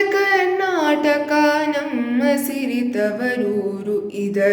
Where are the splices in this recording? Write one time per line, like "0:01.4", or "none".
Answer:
none